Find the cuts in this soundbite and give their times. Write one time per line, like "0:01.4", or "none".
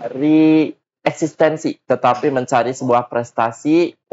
none